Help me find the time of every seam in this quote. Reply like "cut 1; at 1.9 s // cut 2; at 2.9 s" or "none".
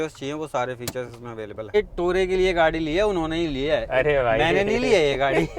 cut 1; at 1.7 s

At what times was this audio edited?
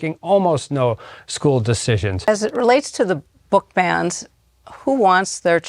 cut 1; at 2.3 s

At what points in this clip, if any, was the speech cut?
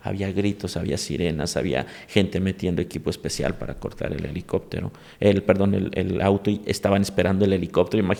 none

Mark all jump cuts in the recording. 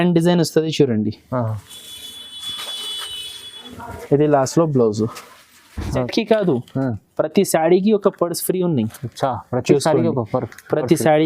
cut 1; at 6.1 s

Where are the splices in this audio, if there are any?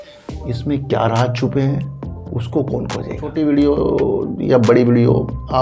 cut 1; at 3.2 s

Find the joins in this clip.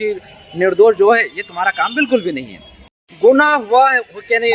cut 1; at 2.9 s

